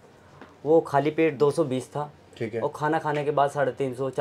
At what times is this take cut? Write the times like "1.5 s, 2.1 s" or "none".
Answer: none